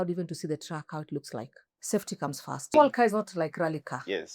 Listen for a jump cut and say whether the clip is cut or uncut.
cut